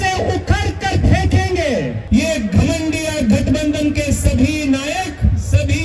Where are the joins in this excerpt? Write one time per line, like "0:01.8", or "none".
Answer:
0:02.0

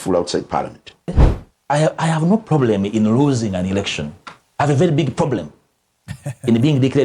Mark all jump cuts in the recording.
0:01.2

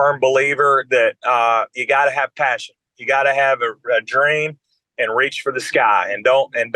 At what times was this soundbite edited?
none

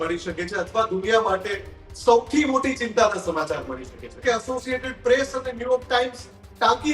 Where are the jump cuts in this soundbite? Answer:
0:04.1

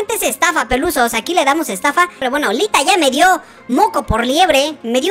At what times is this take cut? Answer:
0:02.2

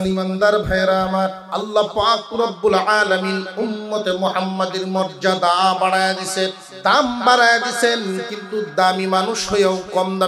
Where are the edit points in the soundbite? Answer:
0:01.4
0:06.7

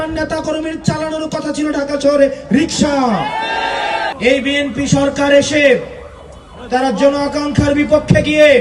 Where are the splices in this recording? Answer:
0:04.1

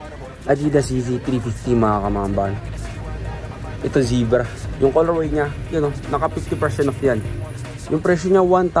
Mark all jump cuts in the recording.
none

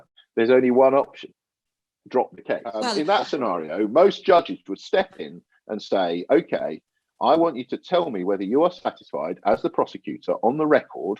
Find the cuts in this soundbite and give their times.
0:02.7

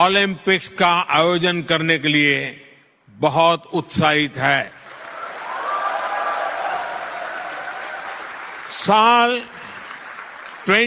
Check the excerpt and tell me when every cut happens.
0:08.6

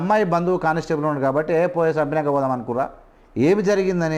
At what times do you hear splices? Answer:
none

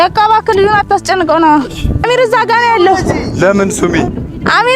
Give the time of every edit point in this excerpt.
0:02.0

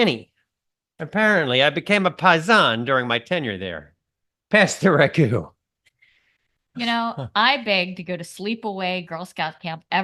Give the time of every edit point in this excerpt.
none

